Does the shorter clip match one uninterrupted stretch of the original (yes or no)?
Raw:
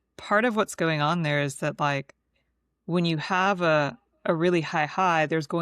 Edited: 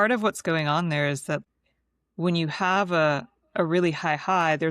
no